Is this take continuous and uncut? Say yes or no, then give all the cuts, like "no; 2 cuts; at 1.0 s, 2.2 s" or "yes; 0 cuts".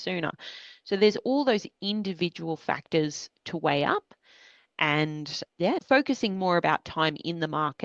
no; 1 cut; at 5.8 s